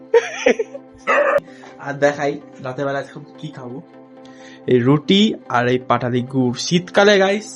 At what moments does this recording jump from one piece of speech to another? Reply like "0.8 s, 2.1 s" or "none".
1.5 s